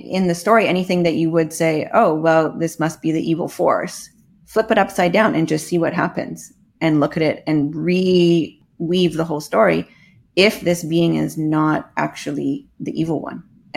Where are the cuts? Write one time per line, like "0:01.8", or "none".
0:08.6